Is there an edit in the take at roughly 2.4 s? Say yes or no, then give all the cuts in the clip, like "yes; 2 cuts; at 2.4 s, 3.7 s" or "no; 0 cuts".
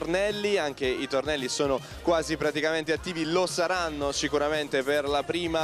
no; 0 cuts